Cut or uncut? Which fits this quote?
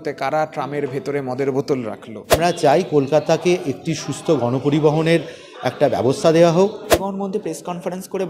cut